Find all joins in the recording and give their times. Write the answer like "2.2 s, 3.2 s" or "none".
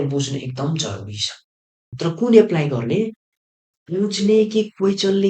2.0 s